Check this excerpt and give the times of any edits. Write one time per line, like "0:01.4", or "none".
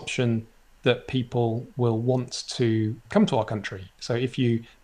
none

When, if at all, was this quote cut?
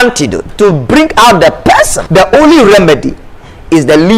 0:02.0

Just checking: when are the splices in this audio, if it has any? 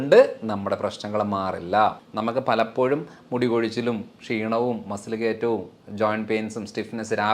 0:02.1

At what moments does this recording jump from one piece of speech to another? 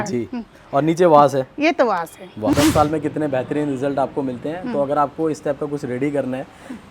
0:02.5

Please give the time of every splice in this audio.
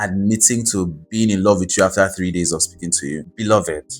none

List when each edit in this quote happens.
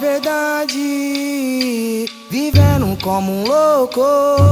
none

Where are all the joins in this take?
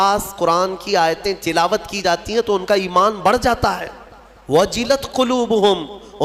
none

